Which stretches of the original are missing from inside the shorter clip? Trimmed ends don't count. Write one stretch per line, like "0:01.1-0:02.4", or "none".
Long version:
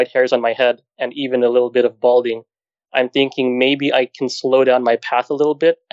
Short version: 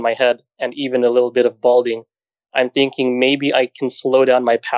none